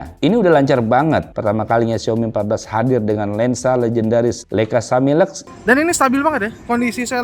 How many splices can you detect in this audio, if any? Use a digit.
2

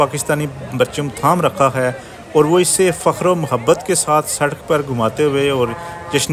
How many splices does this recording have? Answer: 0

